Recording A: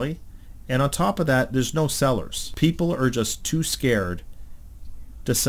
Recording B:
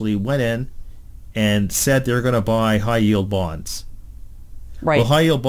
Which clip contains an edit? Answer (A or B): A